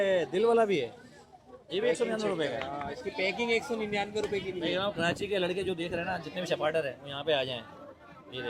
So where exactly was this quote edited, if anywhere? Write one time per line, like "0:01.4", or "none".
none